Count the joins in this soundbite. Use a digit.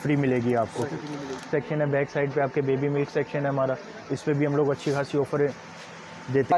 0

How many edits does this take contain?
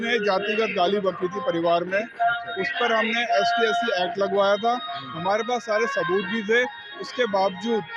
0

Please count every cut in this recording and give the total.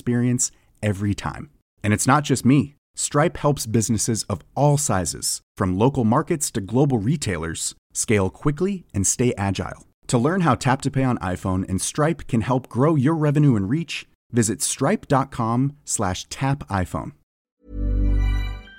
1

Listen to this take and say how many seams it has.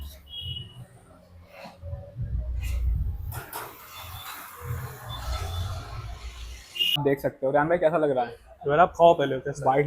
1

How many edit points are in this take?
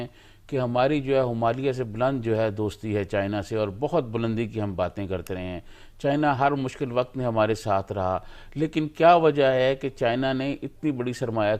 0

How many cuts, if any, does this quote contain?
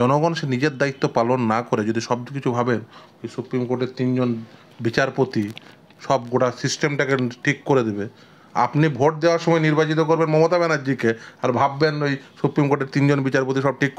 0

